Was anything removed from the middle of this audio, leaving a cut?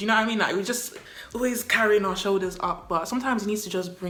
no; 0 cuts

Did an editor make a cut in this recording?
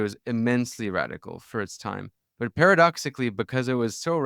yes; 1 cut; at 2.2 s

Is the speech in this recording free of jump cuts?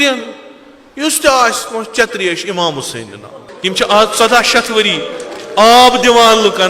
no; 1 cut; at 3.3 s

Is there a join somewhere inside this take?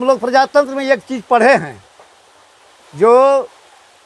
no; 0 cuts

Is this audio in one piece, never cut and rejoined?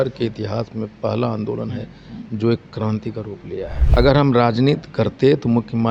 no; 1 cut; at 3.8 s

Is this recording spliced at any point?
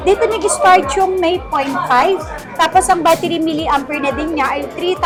no; 0 cuts

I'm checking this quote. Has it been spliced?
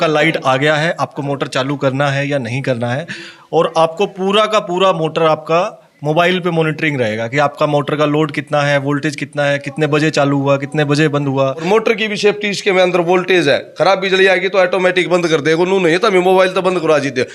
yes; 2 cuts; at 3.3 s, 11.6 s

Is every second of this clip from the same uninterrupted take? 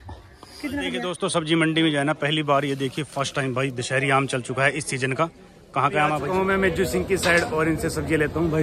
no; 2 cuts; at 1.1 s, 6.2 s

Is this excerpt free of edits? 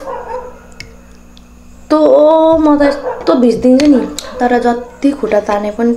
no; 1 cut; at 4.2 s

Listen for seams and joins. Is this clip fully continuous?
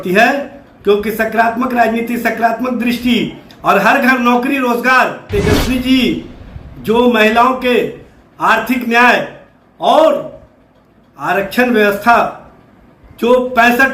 no; 1 cut; at 5.3 s

